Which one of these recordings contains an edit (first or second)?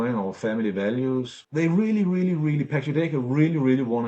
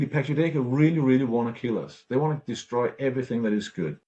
first